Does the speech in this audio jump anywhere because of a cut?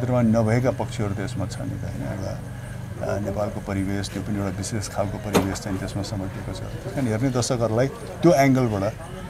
no; 0 cuts

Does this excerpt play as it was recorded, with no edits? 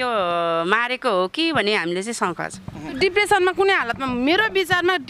no; 1 cut; at 2.9 s

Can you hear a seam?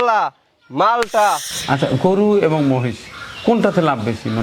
yes; 1 cut; at 1.5 s

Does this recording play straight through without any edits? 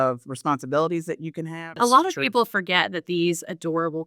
no; 1 cut; at 1.6 s

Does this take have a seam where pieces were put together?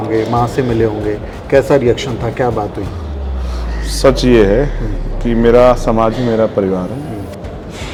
no; 0 cuts

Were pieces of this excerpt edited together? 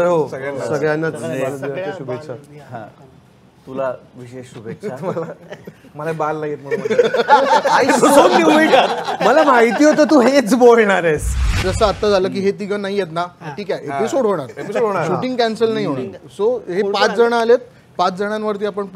yes; 1 cut; at 11.6 s

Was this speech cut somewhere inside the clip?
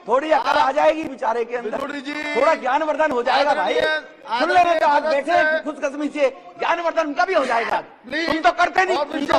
no; 0 cuts

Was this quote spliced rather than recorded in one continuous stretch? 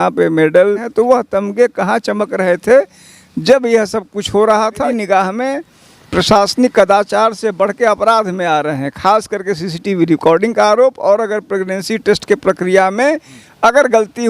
yes; 2 cuts; at 0.9 s, 4.9 s

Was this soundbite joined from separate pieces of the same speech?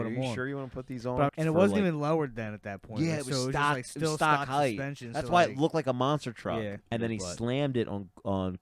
yes; 2 cuts; at 1.3 s, 6.8 s

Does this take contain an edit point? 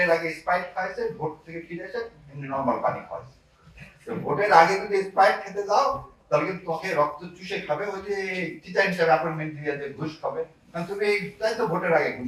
no; 0 cuts

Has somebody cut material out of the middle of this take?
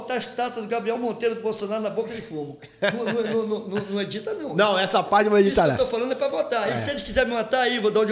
no; 0 cuts

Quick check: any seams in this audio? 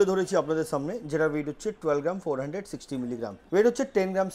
yes; 1 cut; at 3.4 s

